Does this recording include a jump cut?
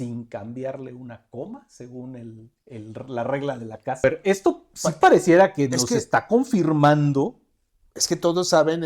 yes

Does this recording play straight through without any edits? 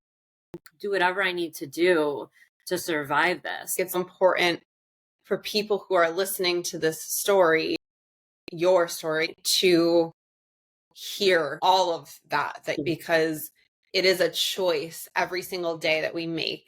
no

